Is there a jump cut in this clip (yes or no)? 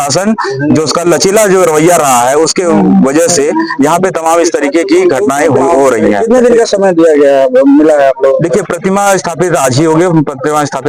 no